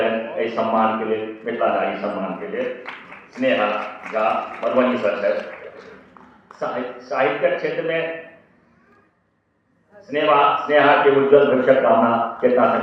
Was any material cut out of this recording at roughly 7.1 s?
no; 0 cuts

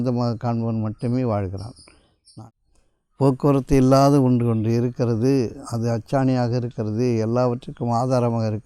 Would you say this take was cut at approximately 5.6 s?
no; 1 cut; at 2.3 s

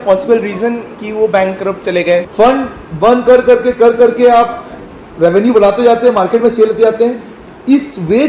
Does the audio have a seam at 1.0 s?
no; 1 cut; at 2.3 s

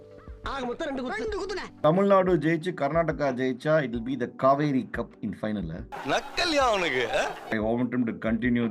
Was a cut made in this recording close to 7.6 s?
yes; 2 cuts; at 1.8 s, 7.6 s

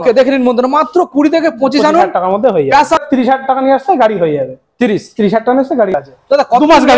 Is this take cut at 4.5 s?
no; 2 cuts; at 3.0 s, 6.0 s

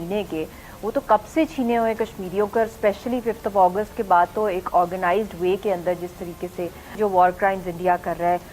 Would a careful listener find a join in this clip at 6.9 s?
yes; 1 cut; at 6.9 s

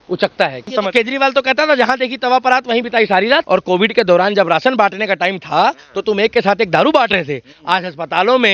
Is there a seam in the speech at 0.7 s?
yes; 2 cuts; at 0.7 s, 3.4 s

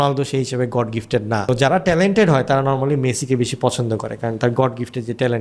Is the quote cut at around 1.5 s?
yes; 1 cut; at 1.5 s

